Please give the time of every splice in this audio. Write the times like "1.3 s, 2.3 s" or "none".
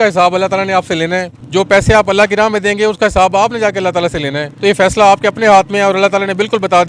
1.4 s, 4.4 s